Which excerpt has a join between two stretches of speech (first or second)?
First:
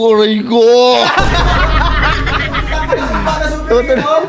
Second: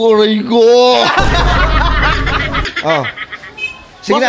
second